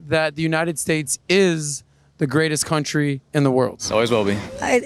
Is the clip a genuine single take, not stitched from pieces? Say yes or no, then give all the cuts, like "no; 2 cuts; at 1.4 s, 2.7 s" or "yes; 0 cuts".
yes; 0 cuts